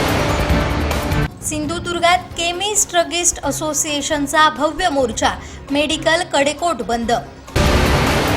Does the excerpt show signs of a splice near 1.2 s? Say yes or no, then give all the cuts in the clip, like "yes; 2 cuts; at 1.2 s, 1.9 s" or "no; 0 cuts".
yes; 1 cut; at 1.2 s